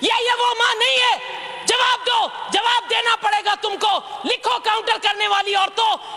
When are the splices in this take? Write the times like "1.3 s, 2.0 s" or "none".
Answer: none